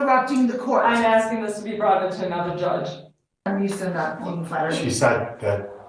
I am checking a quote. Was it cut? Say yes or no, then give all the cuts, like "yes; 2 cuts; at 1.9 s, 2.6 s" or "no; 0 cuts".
yes; 1 cut; at 3.5 s